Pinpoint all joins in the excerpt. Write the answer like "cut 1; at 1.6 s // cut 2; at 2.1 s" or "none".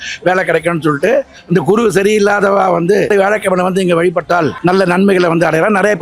cut 1; at 3.1 s // cut 2; at 4.5 s